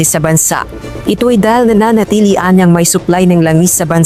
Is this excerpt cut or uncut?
uncut